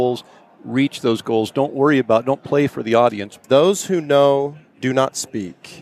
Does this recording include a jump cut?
yes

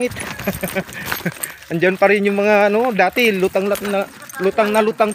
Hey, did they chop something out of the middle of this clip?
no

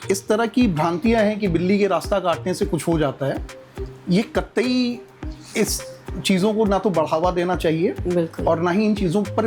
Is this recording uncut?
yes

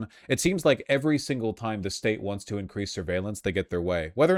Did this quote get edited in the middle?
no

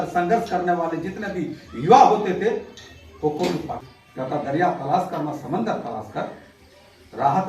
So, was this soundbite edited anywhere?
yes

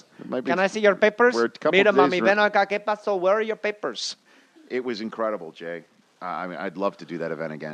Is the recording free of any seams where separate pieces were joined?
no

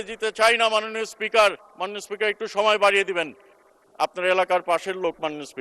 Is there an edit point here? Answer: yes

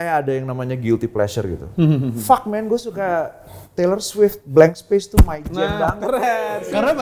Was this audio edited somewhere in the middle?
no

